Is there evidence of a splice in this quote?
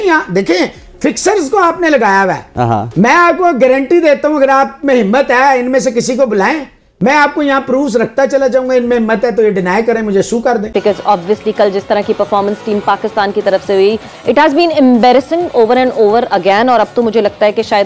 yes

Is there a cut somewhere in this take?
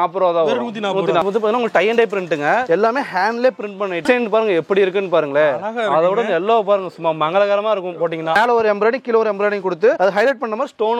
yes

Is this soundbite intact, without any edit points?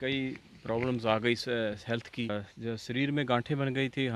no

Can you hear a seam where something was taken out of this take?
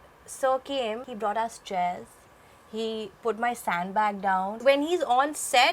yes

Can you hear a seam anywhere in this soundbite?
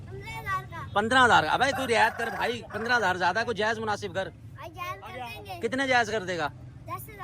no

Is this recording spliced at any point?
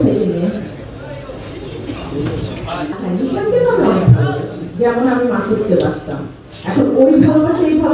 yes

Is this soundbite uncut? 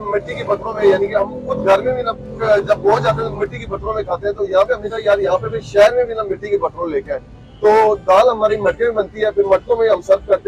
yes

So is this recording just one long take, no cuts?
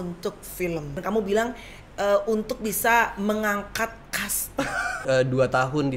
no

